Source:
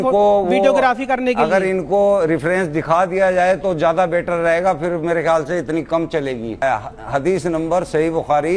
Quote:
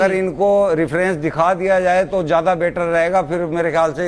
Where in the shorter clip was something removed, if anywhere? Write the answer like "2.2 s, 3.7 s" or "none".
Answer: none